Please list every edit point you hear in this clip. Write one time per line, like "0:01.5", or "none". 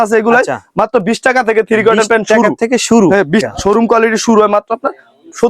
0:03.4